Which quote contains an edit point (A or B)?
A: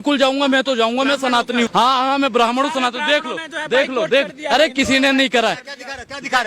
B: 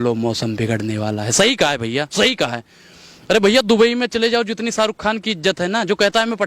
A